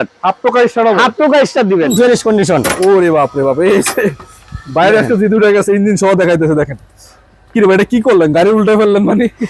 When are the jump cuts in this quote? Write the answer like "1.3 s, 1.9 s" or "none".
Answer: 1.9 s